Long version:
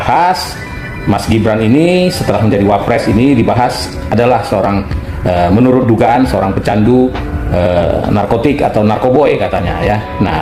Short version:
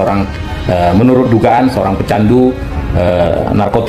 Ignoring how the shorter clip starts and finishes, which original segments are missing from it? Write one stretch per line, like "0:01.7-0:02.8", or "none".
none